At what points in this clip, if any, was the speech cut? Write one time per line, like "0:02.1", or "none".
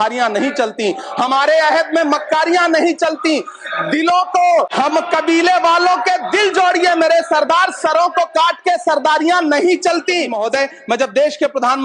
0:04.7
0:10.3